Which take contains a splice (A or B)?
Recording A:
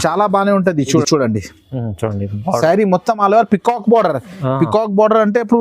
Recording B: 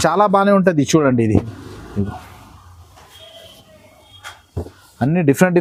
A